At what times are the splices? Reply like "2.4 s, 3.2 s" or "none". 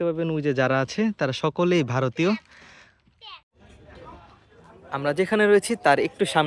3.6 s